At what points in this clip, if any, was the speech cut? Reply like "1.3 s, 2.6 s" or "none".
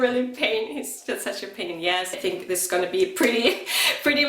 2.1 s